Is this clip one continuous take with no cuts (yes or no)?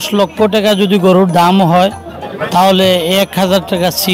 yes